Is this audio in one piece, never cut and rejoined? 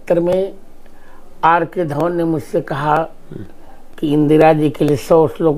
yes; 0 cuts

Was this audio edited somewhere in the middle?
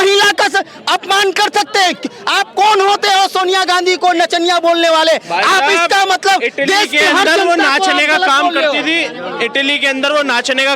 no; 0 cuts

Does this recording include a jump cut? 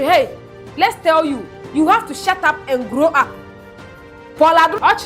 no; 0 cuts

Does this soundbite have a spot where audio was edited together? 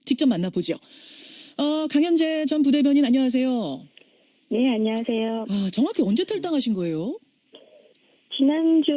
no; 0 cuts

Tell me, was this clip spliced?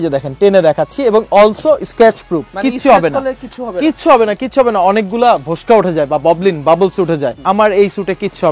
no; 0 cuts

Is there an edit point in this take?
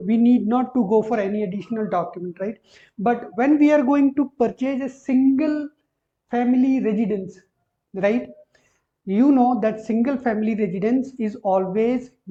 no; 0 cuts

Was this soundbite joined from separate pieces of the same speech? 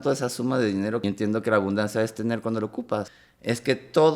yes; 2 cuts; at 1.0 s, 3.1 s

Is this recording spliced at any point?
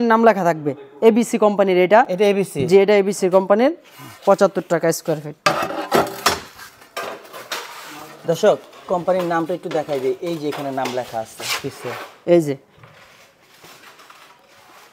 no; 0 cuts

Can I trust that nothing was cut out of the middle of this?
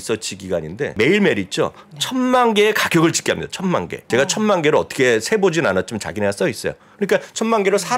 no; 2 cuts; at 0.9 s, 4.0 s

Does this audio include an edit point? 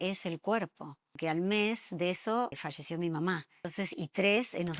yes; 3 cuts; at 1.2 s, 2.6 s, 3.7 s

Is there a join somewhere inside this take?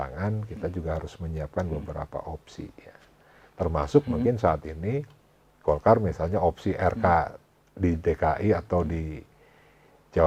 no; 0 cuts

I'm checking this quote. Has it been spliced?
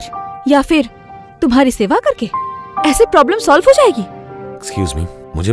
yes; 1 cut; at 4.2 s

